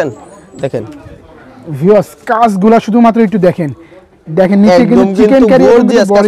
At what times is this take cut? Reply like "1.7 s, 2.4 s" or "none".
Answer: none